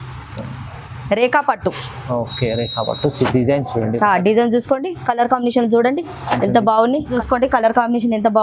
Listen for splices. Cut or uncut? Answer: cut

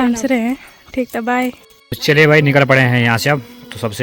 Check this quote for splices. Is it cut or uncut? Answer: cut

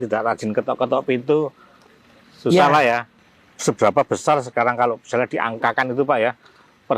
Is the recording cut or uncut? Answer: cut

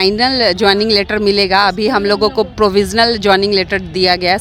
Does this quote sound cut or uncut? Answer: uncut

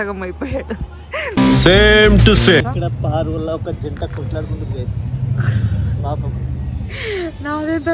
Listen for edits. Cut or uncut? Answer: cut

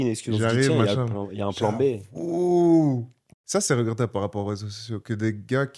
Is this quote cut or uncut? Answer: cut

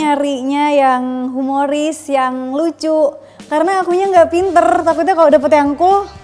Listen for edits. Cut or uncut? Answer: uncut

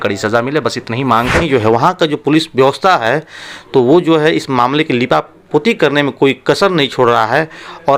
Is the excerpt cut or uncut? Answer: cut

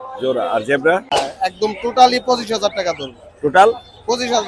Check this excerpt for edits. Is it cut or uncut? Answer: cut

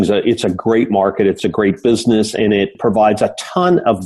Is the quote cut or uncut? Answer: cut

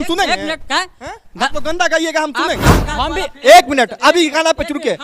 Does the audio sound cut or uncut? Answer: cut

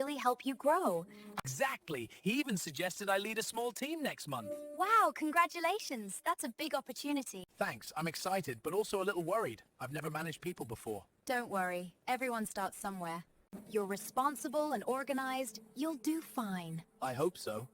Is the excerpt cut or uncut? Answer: cut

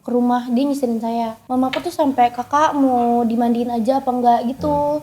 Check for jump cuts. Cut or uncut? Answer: cut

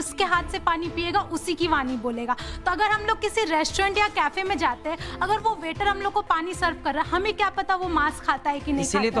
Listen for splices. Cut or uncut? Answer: uncut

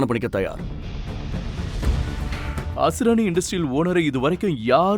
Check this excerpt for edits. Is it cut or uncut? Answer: cut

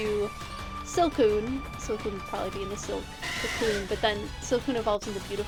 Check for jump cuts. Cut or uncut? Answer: uncut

